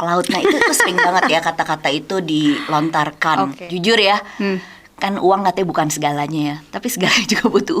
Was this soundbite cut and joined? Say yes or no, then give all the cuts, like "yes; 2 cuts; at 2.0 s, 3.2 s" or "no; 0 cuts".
yes; 1 cut; at 3.6 s